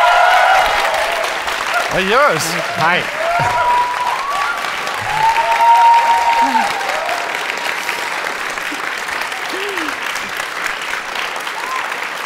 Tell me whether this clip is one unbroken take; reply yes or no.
yes